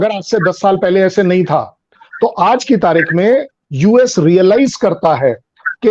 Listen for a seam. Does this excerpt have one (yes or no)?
no